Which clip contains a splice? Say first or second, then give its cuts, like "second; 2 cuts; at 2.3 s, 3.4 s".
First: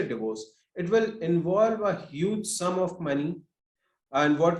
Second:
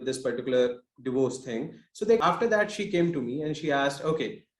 second; 1 cut; at 2.2 s